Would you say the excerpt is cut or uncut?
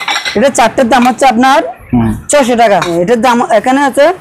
cut